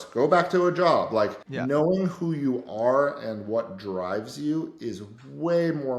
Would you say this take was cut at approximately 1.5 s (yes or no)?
yes